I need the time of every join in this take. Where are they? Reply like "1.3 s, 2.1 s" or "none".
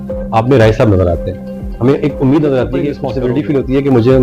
3.0 s